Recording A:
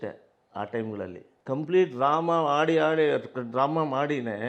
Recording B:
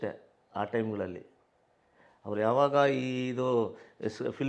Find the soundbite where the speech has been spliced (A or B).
A